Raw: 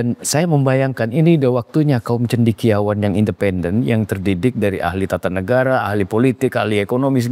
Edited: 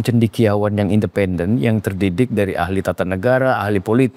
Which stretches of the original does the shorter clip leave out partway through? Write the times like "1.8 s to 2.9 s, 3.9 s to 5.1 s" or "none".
none